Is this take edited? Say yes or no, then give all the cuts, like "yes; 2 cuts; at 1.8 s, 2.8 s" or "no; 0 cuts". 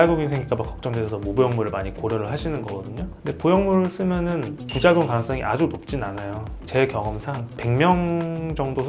yes; 2 cuts; at 6.5 s, 7.6 s